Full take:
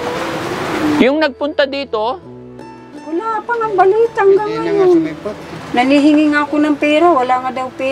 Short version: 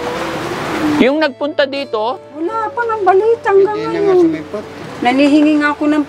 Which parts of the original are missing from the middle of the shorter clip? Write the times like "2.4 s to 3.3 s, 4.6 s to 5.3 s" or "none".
2.3 s to 3.0 s